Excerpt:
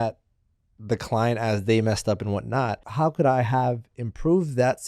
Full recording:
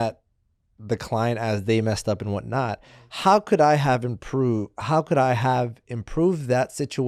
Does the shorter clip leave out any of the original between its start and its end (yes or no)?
yes